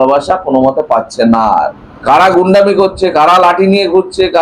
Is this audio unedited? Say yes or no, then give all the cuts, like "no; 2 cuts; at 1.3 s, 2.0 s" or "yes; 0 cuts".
no; 1 cut; at 1.8 s